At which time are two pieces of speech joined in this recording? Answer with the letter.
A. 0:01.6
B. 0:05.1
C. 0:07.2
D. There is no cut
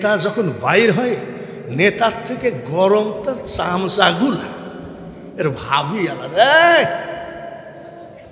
D